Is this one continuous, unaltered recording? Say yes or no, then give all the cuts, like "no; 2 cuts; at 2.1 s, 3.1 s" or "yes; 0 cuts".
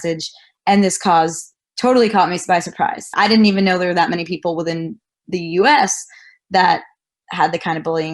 no; 2 cuts; at 3.1 s, 7.2 s